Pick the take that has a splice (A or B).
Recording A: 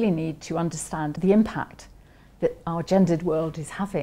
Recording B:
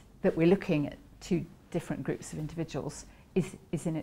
A